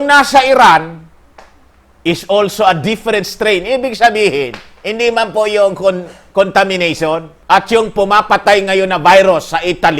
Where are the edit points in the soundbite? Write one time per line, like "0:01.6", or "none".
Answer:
0:07.3

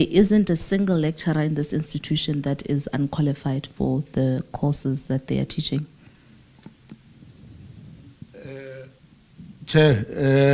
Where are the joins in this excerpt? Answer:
none

